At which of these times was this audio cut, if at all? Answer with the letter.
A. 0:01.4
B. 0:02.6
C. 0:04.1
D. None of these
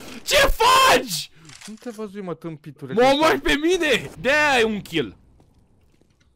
C